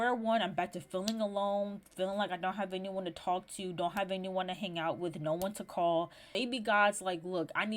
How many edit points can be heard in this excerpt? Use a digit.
1